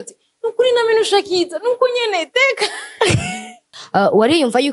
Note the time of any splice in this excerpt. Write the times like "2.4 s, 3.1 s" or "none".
3.7 s